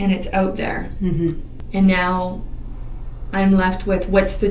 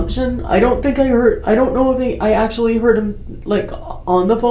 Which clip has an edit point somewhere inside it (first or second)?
first